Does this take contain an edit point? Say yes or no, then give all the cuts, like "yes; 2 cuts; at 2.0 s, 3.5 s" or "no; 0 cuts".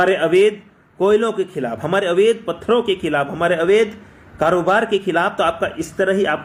no; 0 cuts